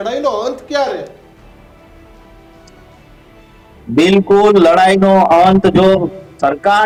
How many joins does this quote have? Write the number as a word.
zero